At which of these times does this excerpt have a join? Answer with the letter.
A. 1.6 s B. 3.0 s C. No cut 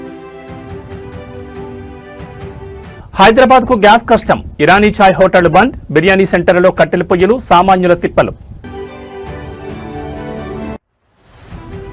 B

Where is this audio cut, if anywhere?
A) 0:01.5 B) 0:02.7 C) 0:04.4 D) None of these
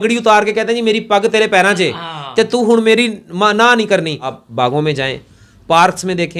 C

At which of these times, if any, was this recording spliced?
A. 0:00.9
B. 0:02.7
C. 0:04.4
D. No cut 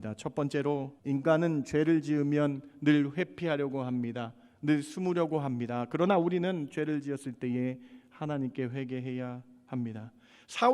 A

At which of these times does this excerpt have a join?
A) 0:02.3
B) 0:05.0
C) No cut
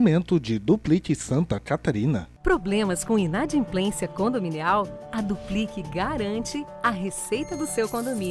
A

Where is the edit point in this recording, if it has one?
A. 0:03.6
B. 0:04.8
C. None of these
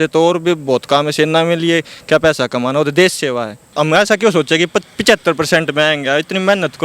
A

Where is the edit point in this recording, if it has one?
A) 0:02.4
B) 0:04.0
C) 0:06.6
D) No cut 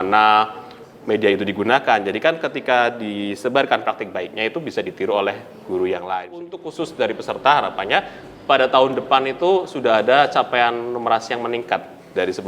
C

